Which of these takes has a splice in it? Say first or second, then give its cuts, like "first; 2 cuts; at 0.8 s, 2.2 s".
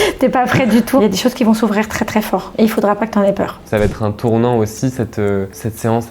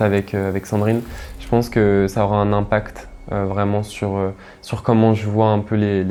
first; 3 cuts; at 1.0 s, 2.5 s, 3.6 s